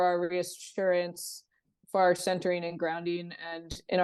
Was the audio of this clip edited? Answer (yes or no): no